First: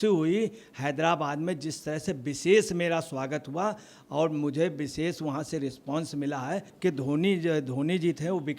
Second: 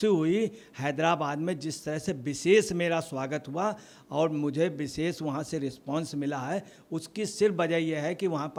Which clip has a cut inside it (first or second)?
first